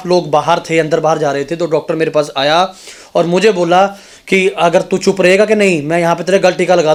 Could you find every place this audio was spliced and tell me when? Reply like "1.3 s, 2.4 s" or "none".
none